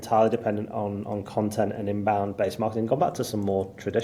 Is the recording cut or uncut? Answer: uncut